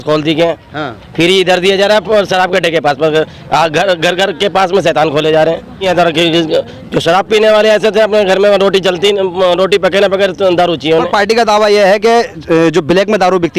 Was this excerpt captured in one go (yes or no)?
no